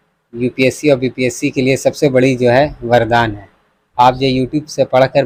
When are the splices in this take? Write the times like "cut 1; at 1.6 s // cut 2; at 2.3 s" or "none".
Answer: none